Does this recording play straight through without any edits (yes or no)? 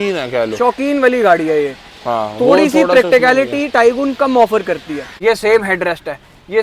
no